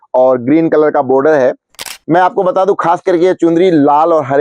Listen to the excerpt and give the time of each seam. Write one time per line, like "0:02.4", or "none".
0:01.7